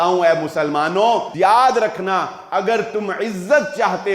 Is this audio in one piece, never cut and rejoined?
no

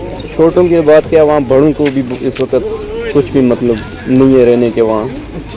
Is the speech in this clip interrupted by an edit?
no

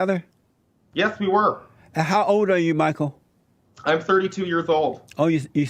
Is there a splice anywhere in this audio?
no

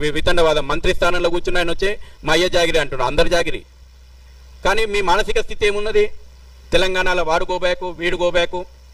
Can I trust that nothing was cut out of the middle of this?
yes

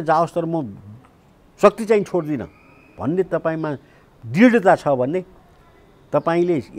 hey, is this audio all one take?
yes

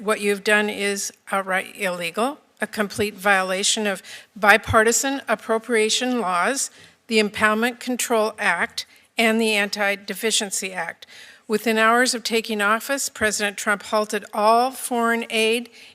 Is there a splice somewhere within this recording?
no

